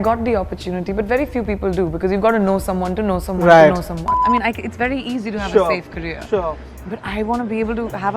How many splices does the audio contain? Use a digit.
1